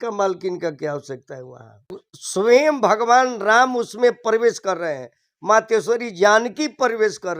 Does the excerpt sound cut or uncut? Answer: cut